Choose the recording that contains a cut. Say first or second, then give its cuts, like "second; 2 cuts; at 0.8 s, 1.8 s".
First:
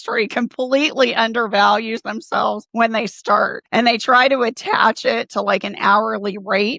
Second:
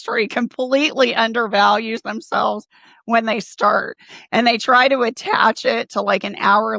first; 2 cuts; at 2.6 s, 3.6 s